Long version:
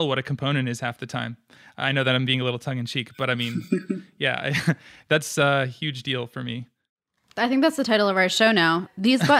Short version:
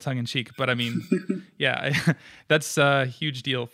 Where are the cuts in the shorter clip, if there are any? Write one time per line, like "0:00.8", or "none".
none